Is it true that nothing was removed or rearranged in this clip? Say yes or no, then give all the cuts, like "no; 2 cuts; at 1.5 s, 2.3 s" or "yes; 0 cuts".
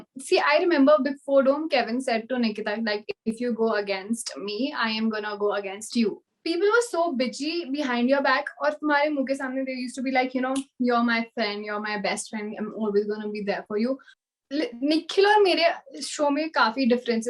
no; 2 cuts; at 6.3 s, 14.1 s